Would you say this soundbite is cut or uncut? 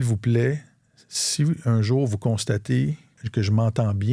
cut